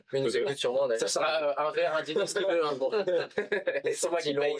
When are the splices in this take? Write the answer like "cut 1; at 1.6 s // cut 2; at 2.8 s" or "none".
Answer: none